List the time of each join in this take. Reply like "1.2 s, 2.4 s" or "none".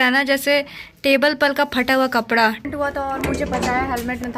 2.6 s